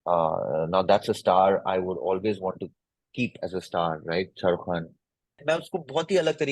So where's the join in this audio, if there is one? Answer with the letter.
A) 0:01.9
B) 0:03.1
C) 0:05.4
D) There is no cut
C